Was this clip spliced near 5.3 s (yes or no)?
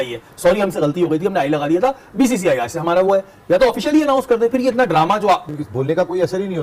no